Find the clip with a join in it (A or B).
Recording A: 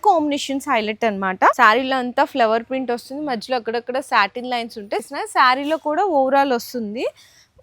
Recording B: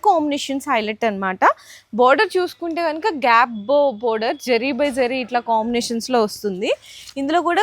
A